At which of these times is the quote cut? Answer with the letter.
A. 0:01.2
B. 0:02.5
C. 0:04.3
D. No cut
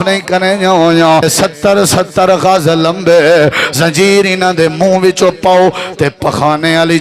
A